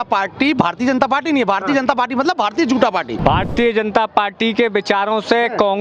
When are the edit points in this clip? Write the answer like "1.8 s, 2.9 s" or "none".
3.1 s